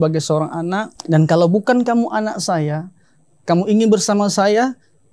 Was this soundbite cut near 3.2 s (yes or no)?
no